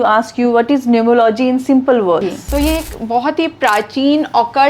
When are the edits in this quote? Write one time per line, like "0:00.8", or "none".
0:02.2